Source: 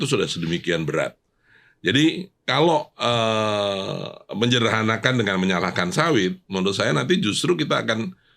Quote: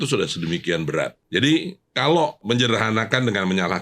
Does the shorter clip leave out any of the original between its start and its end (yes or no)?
yes